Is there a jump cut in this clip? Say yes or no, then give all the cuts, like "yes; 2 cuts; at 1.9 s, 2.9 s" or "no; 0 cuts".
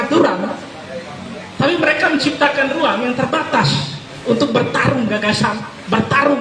no; 0 cuts